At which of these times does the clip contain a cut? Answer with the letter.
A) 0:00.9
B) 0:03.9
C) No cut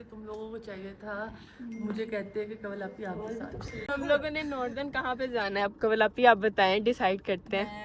B